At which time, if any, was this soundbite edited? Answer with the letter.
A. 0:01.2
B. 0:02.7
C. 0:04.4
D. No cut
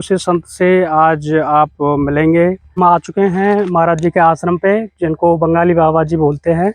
B